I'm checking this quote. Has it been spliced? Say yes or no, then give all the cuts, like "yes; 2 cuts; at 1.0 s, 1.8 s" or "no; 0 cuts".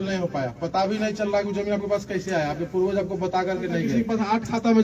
yes; 1 cut; at 3.9 s